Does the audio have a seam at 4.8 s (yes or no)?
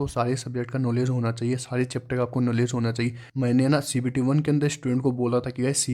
no